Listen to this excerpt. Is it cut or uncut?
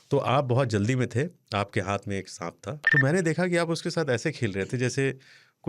cut